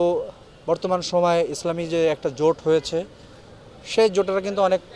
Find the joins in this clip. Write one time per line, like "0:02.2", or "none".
none